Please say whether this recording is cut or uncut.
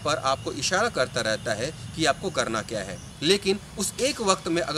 cut